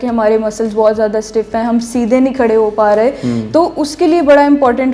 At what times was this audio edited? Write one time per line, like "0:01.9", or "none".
none